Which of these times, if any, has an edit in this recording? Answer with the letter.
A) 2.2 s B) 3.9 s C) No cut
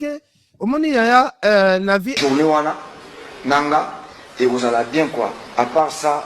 A